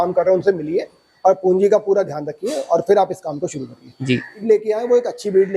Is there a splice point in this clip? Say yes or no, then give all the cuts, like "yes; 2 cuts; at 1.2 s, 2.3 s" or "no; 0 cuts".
yes; 1 cut; at 4.4 s